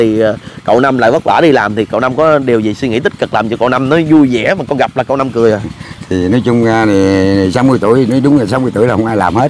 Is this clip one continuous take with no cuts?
yes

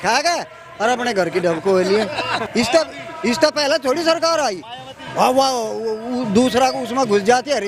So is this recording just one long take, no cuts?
no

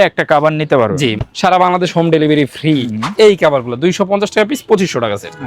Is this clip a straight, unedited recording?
no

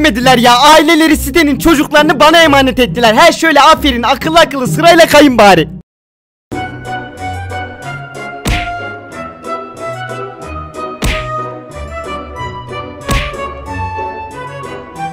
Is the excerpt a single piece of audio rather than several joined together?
yes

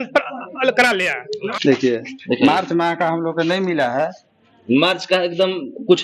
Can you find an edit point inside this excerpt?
yes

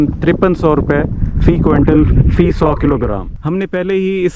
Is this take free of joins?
no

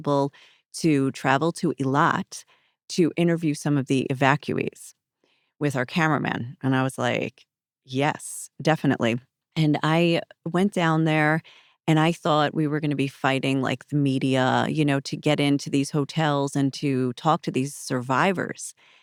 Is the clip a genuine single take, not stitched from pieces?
yes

